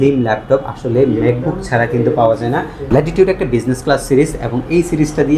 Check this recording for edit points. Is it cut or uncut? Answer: cut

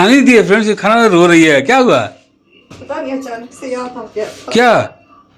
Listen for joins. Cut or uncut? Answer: uncut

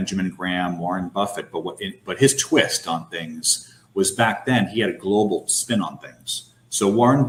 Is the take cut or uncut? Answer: uncut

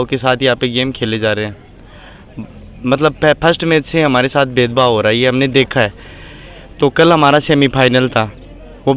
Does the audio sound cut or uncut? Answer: uncut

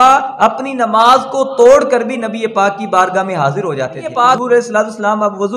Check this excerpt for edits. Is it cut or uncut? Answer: cut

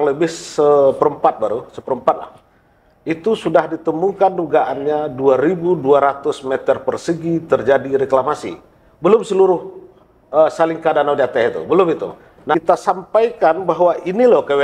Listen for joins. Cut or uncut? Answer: cut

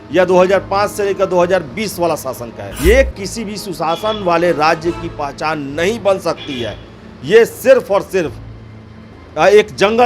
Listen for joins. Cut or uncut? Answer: cut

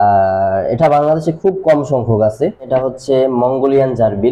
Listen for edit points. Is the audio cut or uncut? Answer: cut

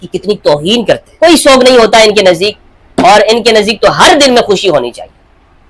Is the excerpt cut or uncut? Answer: cut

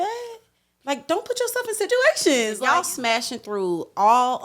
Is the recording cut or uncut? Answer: cut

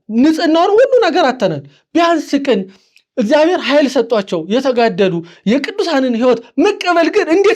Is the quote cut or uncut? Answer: uncut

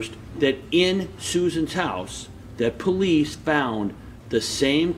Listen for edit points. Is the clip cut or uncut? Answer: uncut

